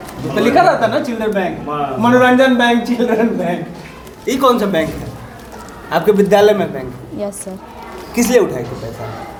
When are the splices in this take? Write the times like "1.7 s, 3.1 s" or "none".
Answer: none